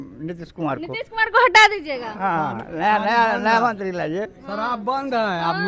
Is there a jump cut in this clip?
no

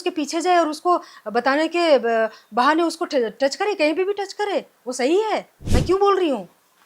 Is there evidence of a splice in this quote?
yes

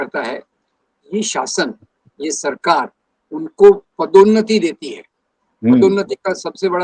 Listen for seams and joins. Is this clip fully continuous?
yes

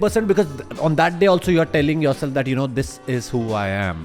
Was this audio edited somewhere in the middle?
no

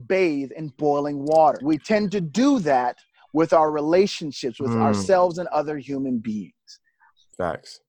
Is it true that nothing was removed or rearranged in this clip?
no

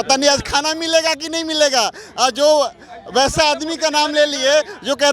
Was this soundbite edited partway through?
no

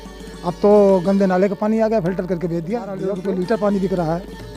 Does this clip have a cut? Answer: yes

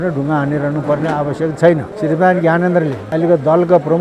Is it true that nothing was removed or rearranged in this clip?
no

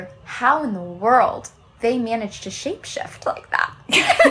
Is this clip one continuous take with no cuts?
yes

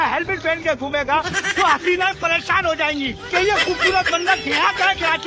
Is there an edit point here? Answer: yes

